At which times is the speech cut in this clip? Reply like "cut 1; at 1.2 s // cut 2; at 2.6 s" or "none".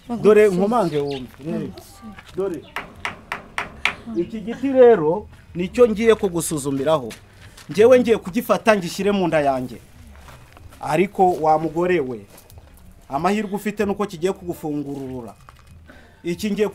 none